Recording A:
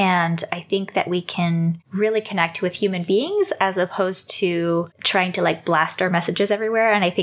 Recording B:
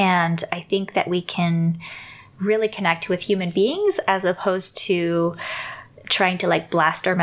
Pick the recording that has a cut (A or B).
A